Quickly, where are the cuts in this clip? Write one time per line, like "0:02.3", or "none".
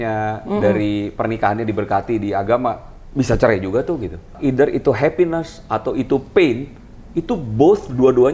0:04.3